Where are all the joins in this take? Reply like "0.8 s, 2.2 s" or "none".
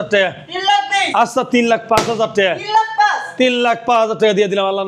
none